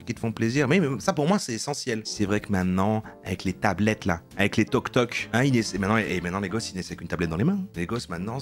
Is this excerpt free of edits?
no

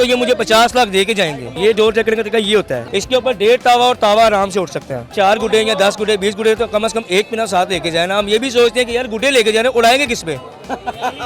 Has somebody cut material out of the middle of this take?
yes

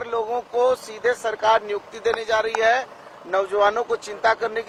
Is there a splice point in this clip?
no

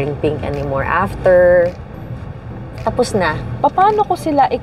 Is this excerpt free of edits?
no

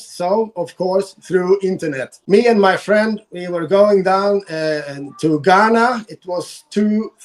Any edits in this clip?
yes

